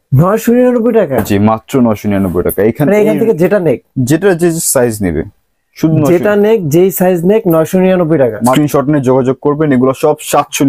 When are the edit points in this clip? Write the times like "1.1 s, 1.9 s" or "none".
8.5 s